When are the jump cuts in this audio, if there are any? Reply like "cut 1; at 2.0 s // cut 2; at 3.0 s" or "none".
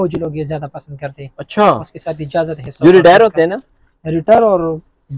none